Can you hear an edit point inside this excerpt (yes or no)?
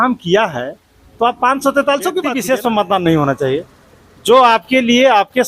yes